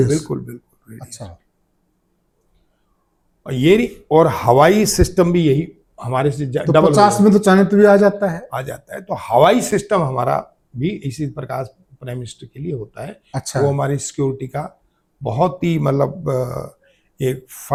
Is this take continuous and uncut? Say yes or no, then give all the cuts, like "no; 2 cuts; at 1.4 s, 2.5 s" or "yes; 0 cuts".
yes; 0 cuts